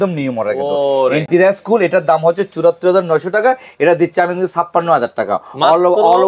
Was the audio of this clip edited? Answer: no; 0 cuts

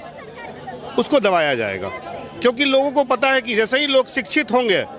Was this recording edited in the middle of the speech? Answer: no; 0 cuts

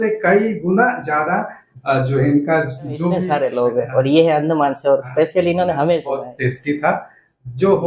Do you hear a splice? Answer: yes; 2 cuts; at 3.2 s, 6.1 s

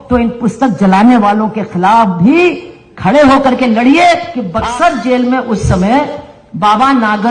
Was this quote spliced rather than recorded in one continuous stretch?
yes; 1 cut; at 4.4 s

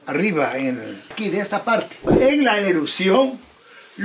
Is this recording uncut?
no; 2 cuts; at 1.1 s, 2.0 s

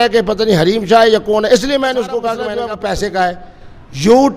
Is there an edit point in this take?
yes; 1 cut; at 2.4 s

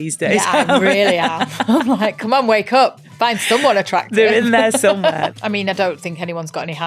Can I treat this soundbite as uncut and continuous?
no; 2 cuts; at 3.0 s, 5.3 s

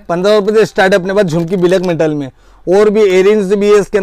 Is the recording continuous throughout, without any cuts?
yes; 0 cuts

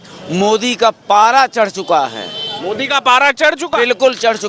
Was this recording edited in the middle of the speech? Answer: no; 0 cuts

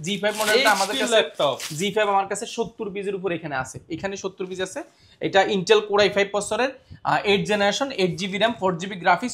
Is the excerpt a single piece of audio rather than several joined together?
yes; 0 cuts

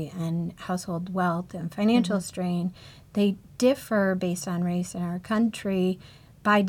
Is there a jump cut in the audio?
no; 0 cuts

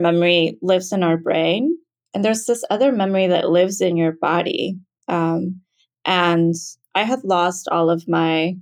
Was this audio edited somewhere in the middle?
no; 0 cuts

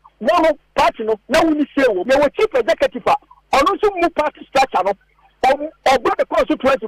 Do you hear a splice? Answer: yes; 1 cut; at 2.0 s

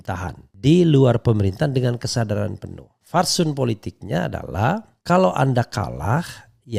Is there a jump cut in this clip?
no; 0 cuts

